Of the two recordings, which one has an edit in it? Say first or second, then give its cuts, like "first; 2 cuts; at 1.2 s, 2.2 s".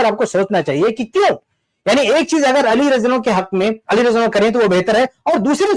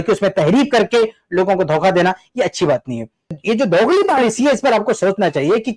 second; 1 cut; at 3.4 s